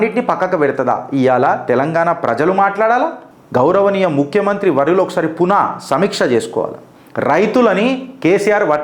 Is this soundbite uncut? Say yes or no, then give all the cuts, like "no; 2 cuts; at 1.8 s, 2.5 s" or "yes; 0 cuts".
yes; 0 cuts